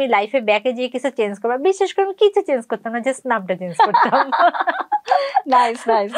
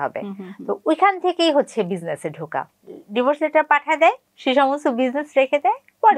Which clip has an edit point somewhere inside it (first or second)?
second